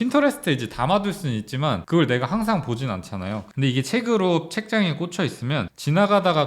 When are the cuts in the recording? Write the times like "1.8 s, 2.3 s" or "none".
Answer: 1.8 s, 3.5 s